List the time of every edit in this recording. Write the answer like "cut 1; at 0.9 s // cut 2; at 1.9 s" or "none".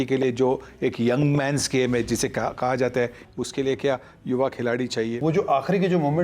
cut 1; at 3.2 s // cut 2; at 5.2 s